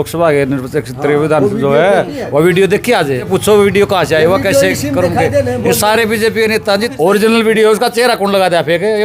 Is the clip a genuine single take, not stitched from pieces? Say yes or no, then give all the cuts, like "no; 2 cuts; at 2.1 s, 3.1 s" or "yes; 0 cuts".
no; 2 cuts; at 3.3 s, 6.9 s